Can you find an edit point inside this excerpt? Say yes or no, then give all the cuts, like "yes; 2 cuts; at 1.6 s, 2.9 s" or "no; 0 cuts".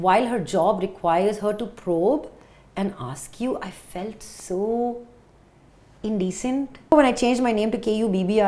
yes; 1 cut; at 6.9 s